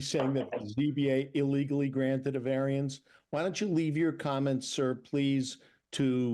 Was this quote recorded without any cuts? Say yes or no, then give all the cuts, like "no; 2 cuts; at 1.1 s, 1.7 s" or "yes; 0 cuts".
yes; 0 cuts